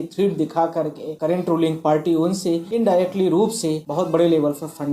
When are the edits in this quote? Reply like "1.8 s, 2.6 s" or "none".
1.0 s, 2.7 s, 3.8 s